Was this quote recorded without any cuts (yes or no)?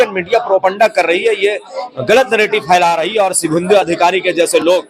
yes